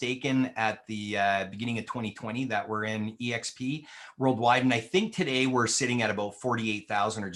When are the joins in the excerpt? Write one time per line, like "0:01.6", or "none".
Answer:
none